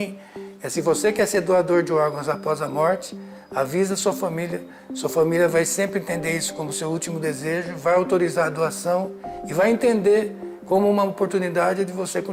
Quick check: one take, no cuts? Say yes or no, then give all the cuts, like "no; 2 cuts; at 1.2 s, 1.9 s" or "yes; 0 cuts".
yes; 0 cuts